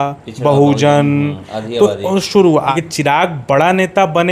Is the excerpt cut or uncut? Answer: cut